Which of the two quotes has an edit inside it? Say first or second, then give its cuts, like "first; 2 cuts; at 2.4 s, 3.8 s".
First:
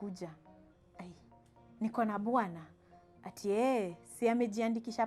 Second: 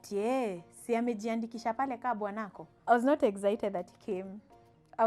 second; 1 cut; at 2.7 s